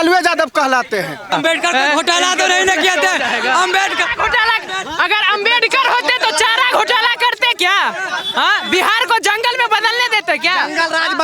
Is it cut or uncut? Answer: cut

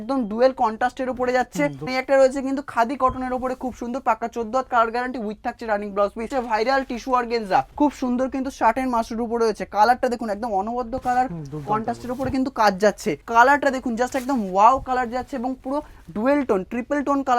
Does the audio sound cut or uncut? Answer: cut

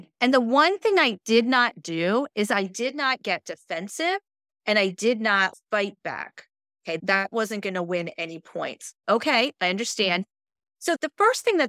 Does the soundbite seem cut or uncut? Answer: cut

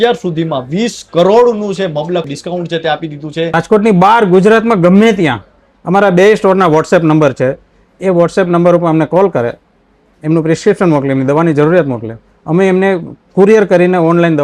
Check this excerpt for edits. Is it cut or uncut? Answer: cut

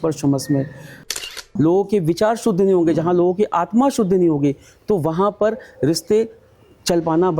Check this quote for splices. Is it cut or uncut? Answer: cut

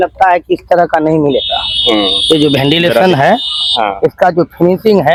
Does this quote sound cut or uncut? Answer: uncut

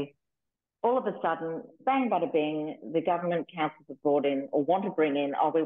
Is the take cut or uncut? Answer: cut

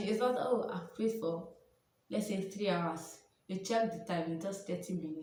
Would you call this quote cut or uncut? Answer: uncut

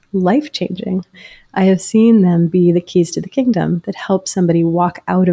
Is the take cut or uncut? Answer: cut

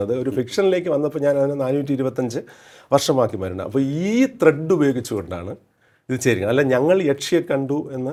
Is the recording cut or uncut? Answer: uncut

